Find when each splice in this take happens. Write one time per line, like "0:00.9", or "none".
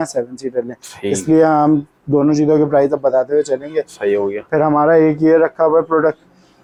none